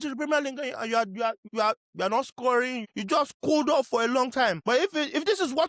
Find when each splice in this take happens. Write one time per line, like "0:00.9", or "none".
0:01.4
0:02.8
0:04.6